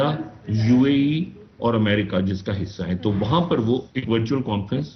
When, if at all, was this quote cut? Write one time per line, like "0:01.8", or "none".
none